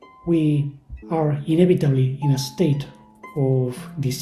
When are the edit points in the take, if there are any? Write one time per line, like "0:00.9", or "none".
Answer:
none

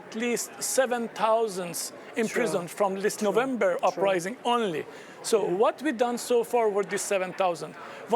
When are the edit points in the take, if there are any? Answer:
none

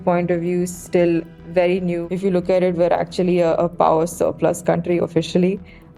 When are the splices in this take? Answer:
0:01.7

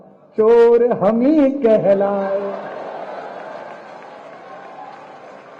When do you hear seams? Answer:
none

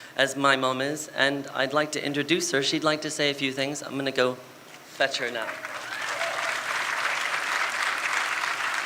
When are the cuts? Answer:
none

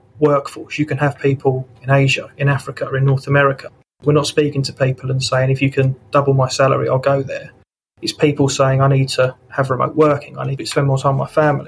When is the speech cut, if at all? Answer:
0:03.9
0:09.4

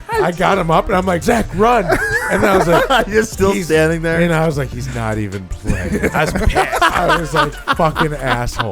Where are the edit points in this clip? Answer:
0:01.2

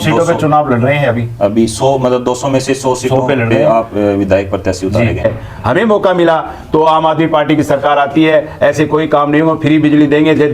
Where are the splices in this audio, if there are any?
0:05.2

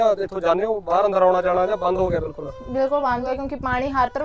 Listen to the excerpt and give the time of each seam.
0:03.3

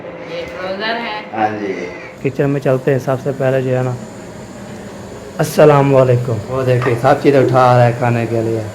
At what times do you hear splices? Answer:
0:02.1
0:06.4

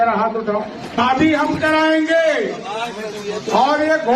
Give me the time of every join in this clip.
0:01.0

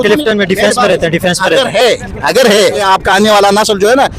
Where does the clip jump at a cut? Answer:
0:02.8

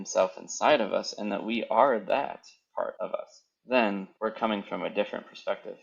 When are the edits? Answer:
0:03.1
0:04.1

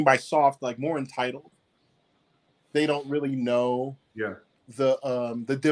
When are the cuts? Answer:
none

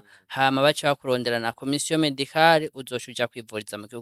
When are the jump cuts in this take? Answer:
none

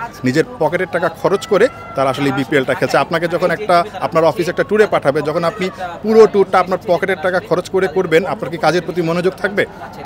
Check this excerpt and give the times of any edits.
none

